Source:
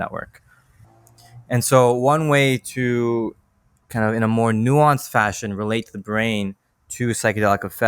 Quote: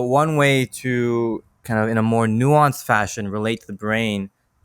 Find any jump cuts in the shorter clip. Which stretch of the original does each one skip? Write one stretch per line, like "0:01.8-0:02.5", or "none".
0:03.4-0:03.8